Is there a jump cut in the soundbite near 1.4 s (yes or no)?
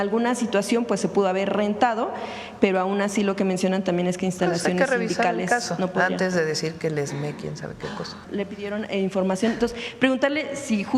no